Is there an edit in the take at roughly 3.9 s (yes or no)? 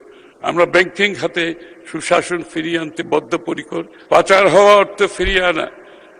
yes